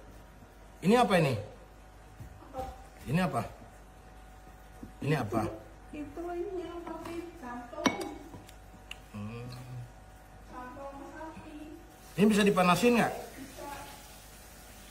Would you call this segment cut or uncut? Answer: uncut